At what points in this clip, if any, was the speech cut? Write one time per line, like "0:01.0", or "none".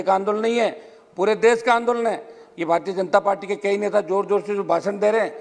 none

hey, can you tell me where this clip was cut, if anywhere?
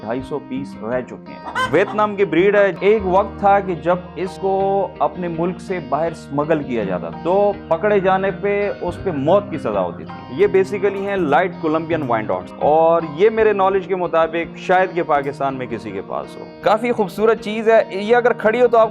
0:01.4
0:02.8
0:10.1
0:16.5

